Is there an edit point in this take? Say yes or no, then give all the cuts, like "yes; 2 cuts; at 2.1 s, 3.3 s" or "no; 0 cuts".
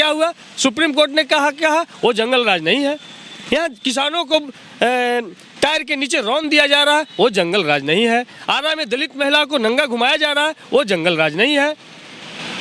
no; 0 cuts